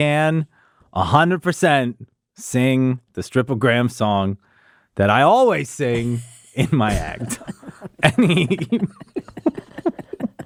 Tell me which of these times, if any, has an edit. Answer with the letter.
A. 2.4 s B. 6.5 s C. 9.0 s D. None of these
D